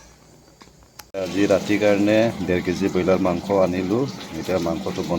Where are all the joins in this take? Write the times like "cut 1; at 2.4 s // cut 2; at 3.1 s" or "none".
cut 1; at 1.1 s

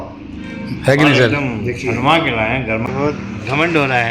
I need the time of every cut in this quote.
cut 1; at 2.9 s

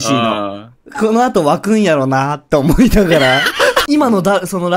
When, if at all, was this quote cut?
cut 1; at 3.8 s

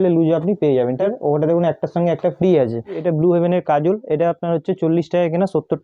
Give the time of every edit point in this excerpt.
cut 1; at 1.0 s // cut 2; at 3.0 s

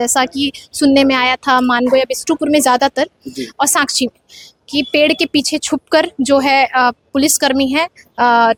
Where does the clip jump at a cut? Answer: none

